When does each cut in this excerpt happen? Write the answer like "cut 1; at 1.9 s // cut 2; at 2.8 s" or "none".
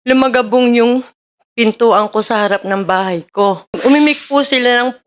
cut 1; at 3.8 s